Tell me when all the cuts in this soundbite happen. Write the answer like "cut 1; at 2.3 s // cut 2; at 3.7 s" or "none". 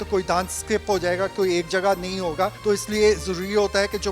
cut 1; at 2.6 s